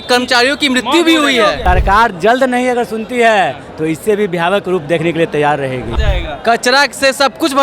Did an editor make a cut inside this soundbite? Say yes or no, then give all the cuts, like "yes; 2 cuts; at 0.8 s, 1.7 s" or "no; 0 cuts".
yes; 2 cuts; at 1.6 s, 5.9 s